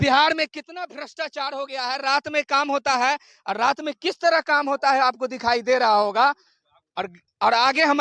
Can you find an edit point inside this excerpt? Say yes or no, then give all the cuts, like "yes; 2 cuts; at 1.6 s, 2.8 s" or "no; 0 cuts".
no; 0 cuts